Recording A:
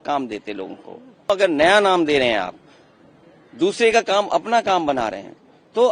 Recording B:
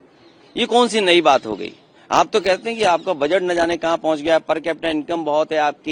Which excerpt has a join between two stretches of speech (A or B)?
A